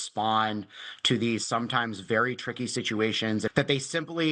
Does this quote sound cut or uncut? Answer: uncut